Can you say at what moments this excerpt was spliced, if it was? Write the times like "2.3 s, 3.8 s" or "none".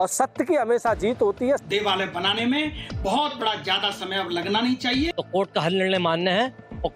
1.6 s, 5.2 s